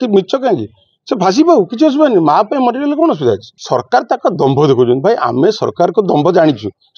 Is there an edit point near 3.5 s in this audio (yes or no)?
yes